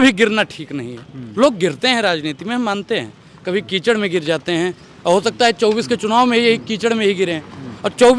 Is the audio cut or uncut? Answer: uncut